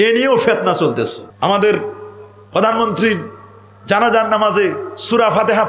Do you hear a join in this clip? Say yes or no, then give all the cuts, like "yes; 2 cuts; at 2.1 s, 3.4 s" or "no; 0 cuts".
yes; 1 cut; at 1.2 s